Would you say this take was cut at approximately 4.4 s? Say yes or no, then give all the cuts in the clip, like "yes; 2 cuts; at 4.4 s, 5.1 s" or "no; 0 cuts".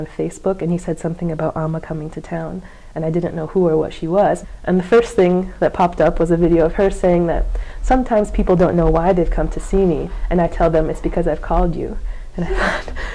yes; 1 cut; at 4.4 s